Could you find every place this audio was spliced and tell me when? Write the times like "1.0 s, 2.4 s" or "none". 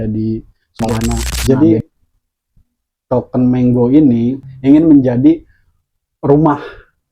1.3 s